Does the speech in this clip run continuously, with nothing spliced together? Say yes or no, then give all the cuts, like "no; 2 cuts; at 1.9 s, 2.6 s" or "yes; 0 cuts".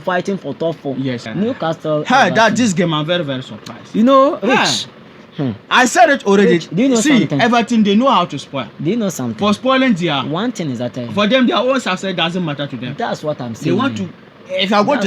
no; 1 cut; at 1.3 s